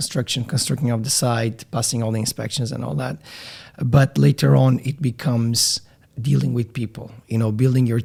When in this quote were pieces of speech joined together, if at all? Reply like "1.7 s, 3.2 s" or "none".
none